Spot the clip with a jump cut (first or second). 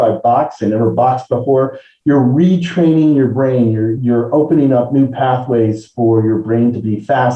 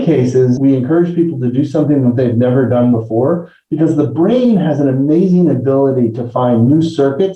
first